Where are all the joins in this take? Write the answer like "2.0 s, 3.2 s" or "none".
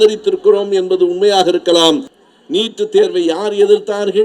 2.1 s